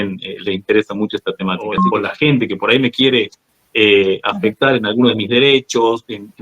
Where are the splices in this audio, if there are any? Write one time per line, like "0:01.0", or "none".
0:01.8